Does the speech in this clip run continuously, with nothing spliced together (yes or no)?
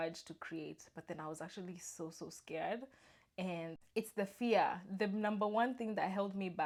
yes